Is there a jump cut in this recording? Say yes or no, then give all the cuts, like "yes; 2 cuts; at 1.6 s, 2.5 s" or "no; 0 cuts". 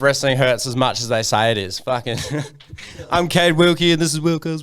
no; 0 cuts